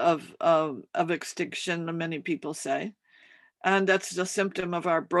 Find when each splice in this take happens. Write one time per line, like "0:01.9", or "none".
none